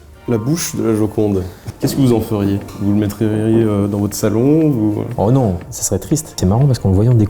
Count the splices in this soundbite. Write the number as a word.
two